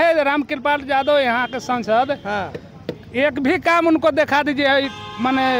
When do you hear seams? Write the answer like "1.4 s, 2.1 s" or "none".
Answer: none